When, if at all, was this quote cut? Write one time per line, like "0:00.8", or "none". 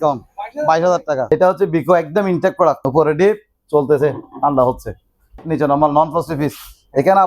0:01.3
0:02.8
0:05.4